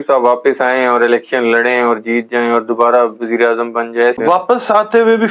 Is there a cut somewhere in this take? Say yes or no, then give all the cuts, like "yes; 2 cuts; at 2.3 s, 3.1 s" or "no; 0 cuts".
yes; 1 cut; at 4.2 s